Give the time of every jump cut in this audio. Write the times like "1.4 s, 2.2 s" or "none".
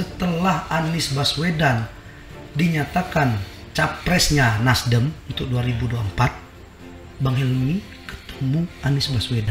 none